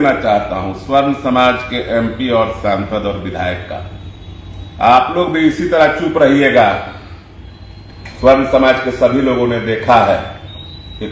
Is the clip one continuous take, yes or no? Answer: yes